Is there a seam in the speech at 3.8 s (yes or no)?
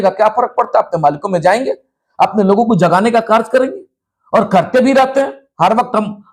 no